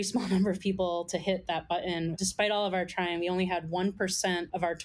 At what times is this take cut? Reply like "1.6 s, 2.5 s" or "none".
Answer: 2.1 s